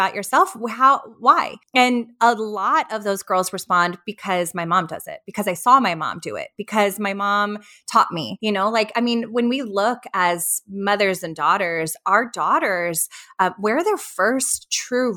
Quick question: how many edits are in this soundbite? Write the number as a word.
two